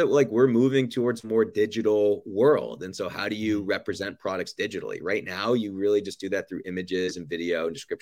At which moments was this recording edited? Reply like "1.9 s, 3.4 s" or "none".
none